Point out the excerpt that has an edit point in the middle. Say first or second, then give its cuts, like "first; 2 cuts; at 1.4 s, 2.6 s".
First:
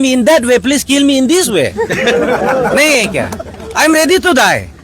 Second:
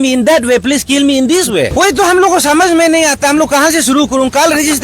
second; 1 cut; at 1.8 s